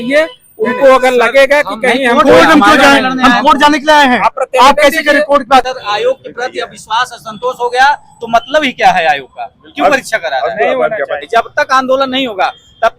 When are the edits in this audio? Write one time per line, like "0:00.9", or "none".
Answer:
0:05.7
0:11.3